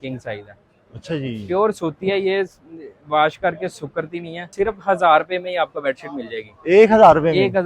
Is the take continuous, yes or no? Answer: no